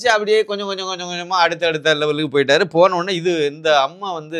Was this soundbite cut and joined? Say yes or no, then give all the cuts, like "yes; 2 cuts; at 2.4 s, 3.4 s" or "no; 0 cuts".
no; 0 cuts